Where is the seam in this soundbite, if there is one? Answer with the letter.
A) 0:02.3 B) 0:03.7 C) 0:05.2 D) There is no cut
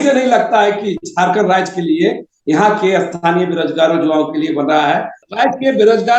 C